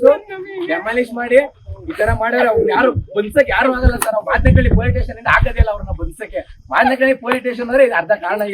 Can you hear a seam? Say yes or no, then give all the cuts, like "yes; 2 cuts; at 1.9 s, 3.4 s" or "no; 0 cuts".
yes; 1 cut; at 2.9 s